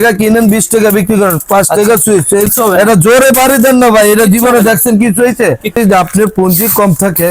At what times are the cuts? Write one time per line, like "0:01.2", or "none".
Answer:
0:02.5
0:05.8